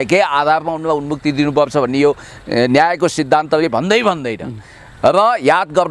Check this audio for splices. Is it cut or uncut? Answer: uncut